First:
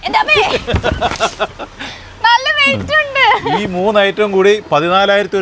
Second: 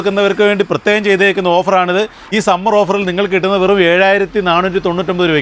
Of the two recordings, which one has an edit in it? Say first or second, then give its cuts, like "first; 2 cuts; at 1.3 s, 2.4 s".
second; 1 cut; at 2.3 s